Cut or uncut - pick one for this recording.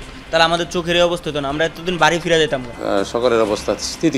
cut